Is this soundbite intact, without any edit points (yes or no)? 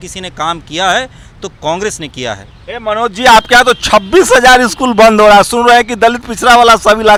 yes